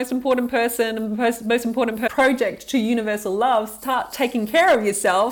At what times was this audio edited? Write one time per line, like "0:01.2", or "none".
0:02.0